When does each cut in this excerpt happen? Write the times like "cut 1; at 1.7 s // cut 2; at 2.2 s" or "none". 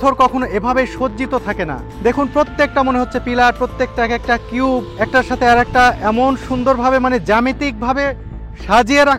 cut 1; at 1.8 s // cut 2; at 4.9 s